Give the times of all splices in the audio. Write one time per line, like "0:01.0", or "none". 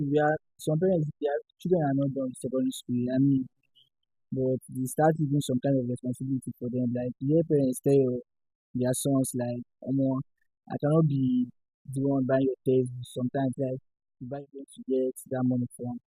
0:14.3